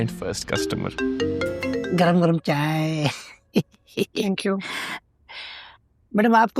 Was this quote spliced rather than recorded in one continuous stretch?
yes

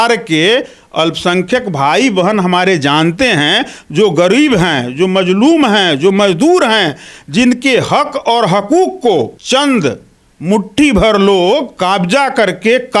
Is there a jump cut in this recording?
yes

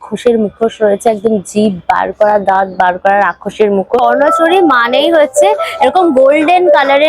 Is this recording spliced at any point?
yes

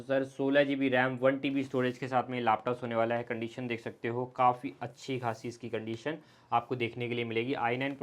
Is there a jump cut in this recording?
no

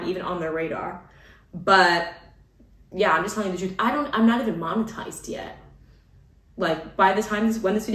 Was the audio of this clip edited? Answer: no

